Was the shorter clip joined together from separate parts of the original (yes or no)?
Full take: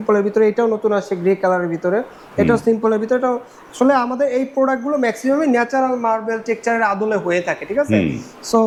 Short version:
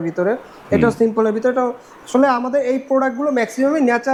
no